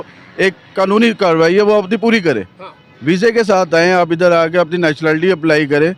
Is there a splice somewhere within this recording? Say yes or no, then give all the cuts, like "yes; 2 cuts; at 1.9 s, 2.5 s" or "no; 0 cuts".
no; 0 cuts